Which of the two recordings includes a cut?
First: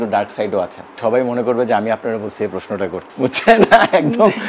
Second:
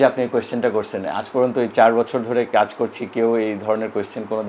first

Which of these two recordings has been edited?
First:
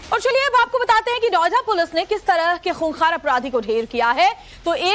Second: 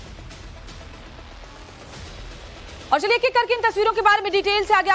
second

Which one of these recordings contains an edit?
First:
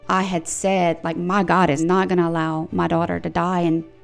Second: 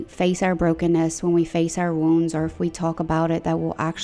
first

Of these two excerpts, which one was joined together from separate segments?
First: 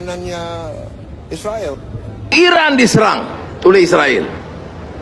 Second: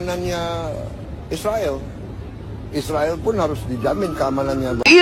first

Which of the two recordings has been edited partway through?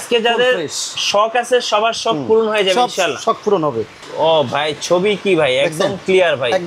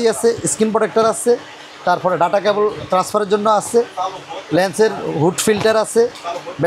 first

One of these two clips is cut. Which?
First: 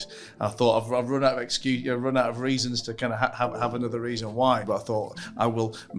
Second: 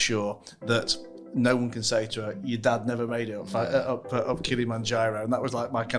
first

